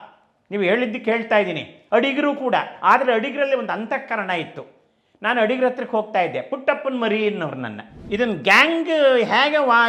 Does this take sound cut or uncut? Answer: cut